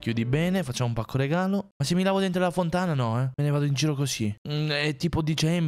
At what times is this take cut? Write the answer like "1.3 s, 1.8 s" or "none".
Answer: 1.7 s, 3.3 s